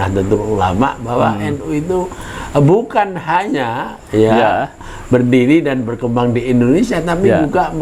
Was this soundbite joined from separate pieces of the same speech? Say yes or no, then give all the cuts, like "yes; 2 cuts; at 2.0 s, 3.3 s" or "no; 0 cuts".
no; 0 cuts